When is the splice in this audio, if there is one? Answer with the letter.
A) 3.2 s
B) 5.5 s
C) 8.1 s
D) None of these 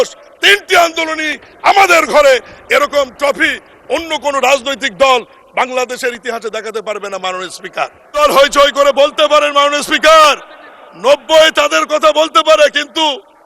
C